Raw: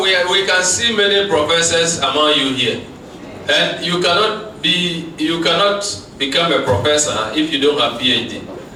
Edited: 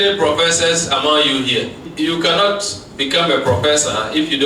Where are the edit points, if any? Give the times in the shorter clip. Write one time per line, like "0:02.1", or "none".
0:01.8